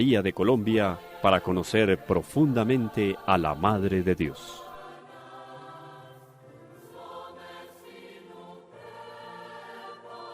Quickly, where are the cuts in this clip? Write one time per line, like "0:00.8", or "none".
0:05.0